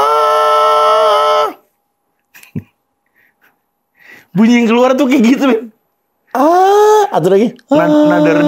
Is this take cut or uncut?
uncut